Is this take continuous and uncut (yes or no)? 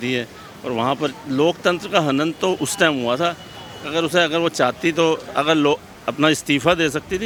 yes